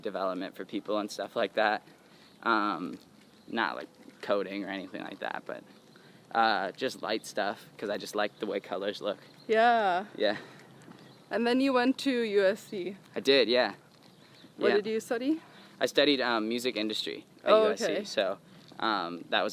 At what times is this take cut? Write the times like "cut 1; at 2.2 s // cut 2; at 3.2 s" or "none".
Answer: none

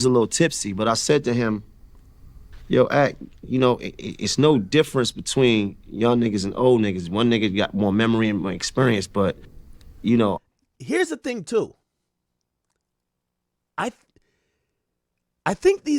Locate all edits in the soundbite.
none

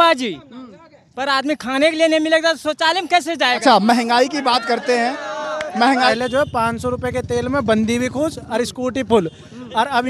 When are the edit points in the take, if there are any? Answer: cut 1; at 6.1 s

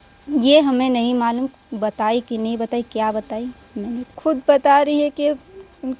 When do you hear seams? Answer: cut 1; at 4.2 s

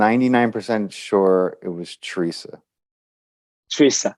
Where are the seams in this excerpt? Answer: none

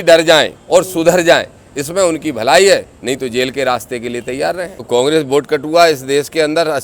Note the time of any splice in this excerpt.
cut 1; at 4.8 s

